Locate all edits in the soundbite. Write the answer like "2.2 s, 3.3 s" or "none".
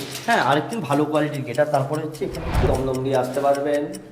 2.7 s